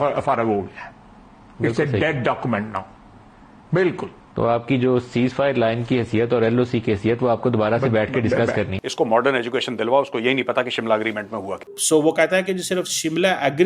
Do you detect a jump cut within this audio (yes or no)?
no